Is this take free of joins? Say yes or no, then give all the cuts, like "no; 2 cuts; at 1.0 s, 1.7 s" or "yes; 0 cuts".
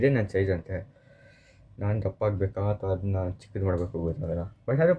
yes; 0 cuts